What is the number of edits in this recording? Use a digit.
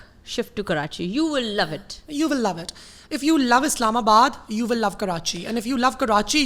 0